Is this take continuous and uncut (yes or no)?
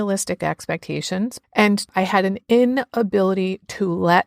no